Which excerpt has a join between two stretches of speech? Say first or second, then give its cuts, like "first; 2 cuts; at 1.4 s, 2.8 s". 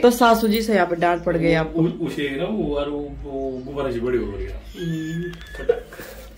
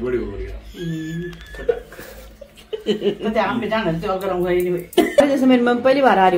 second; 1 cut; at 5.2 s